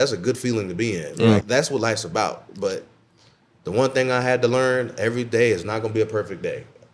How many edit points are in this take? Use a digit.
1